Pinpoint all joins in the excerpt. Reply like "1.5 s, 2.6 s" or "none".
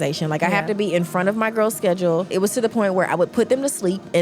2.3 s